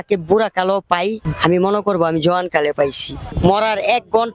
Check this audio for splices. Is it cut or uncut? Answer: cut